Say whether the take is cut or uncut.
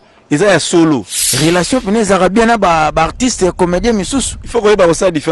cut